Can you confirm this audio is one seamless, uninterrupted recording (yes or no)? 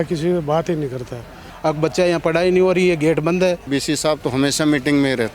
no